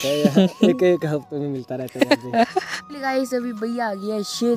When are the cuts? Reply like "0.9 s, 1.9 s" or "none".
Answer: 2.8 s